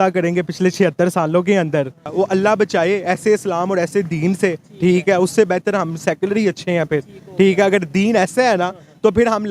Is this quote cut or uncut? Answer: cut